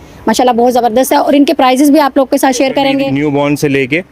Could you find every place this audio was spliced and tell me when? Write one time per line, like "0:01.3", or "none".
0:03.1

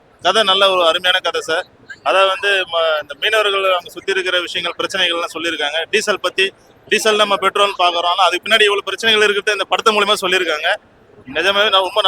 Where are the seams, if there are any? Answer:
none

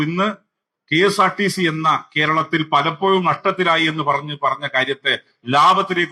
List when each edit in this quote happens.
none

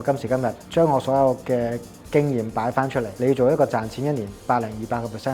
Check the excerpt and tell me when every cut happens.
none

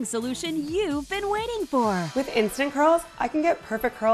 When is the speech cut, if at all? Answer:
0:02.1

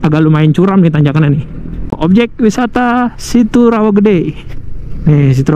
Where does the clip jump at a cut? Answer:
0:01.9

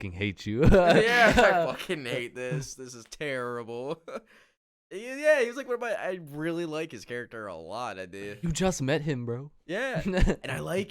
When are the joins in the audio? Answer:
none

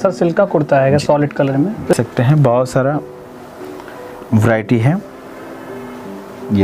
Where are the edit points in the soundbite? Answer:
0:01.9

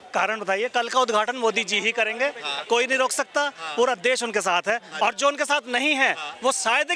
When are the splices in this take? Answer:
none

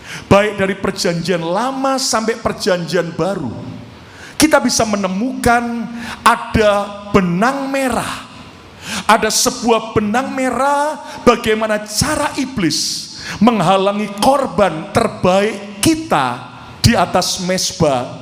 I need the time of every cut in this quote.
none

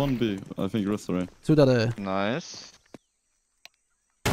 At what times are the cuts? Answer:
0:03.0

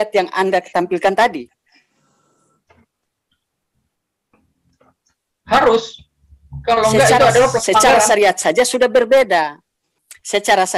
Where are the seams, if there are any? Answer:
none

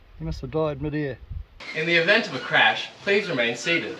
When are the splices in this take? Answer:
0:01.6

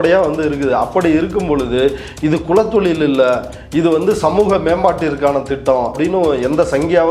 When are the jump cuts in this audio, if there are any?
0:06.0

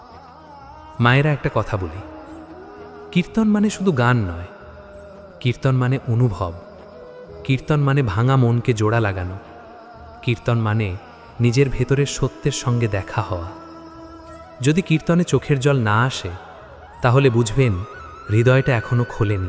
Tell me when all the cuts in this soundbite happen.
0:01.0

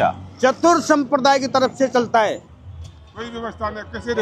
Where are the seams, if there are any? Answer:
0:02.5

